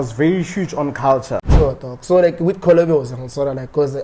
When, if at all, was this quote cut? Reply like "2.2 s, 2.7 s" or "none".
1.5 s